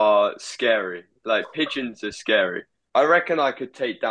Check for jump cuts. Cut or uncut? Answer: cut